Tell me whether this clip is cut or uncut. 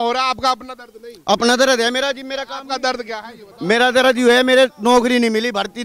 uncut